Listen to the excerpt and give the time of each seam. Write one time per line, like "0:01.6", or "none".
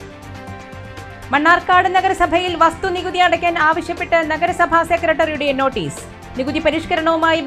0:01.0